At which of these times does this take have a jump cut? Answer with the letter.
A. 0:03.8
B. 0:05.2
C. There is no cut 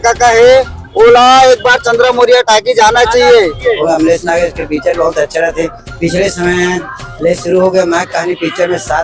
A